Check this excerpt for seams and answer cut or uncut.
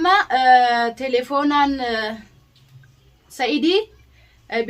uncut